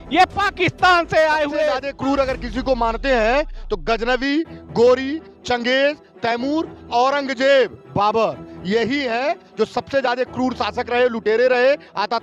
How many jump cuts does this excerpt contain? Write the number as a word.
one